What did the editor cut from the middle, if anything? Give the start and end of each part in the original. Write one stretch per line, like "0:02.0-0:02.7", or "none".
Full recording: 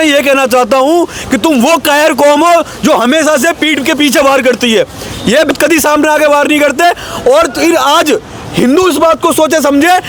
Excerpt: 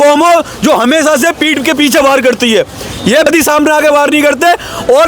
0:05.4-0:05.6